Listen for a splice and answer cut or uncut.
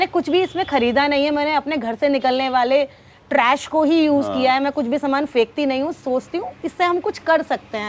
uncut